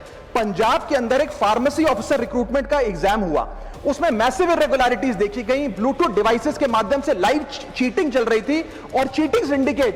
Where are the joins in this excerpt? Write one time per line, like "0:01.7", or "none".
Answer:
none